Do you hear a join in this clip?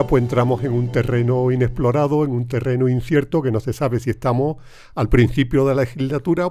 no; 0 cuts

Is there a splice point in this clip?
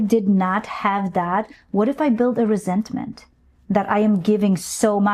no; 0 cuts

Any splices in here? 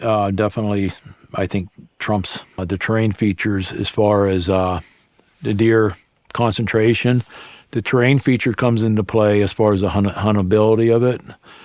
yes; 1 cut; at 2.6 s

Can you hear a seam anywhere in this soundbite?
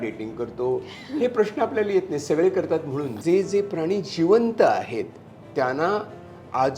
yes; 1 cut; at 3.2 s

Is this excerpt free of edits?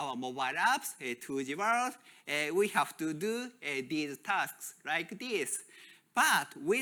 yes; 0 cuts

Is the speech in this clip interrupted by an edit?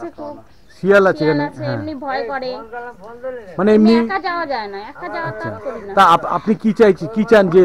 no; 0 cuts

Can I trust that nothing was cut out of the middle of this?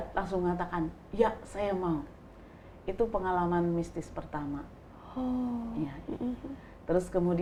yes; 0 cuts

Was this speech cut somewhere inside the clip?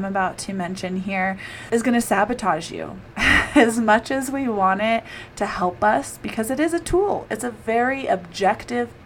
yes; 1 cut; at 1.5 s

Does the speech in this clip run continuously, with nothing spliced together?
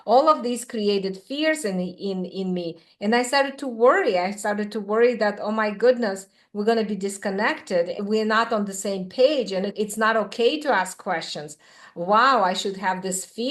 no; 2 cuts; at 8.0 s, 9.7 s

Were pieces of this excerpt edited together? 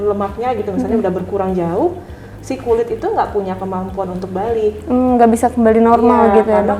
no; 0 cuts

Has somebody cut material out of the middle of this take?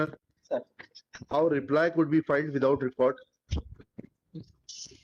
no; 0 cuts

